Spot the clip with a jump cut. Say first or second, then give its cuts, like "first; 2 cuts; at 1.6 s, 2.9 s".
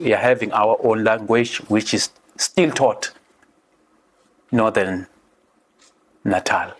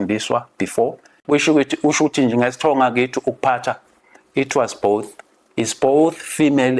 second; 1 cut; at 1.1 s